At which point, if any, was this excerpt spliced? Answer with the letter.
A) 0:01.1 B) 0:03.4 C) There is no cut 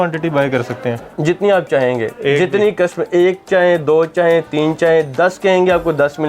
A